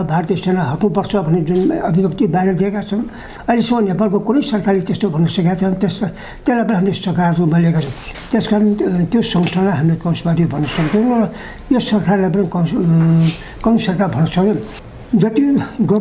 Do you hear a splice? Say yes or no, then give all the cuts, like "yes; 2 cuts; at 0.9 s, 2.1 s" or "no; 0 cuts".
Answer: yes; 2 cuts; at 8.0 s, 14.8 s